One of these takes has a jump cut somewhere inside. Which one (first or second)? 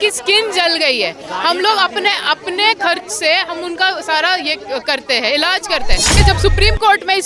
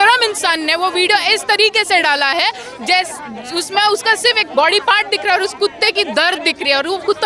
first